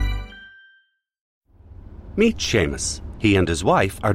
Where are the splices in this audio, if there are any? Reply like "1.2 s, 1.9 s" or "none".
1.2 s